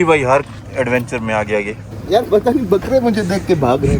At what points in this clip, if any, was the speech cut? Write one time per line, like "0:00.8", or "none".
0:01.9